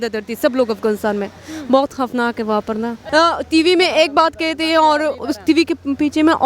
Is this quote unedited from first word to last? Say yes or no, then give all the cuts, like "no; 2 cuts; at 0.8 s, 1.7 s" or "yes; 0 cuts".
no; 1 cut; at 3.0 s